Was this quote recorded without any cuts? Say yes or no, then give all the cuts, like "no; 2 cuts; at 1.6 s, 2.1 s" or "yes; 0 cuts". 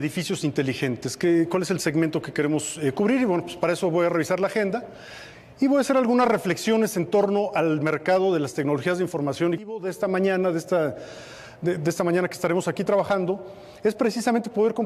no; 1 cut; at 9.3 s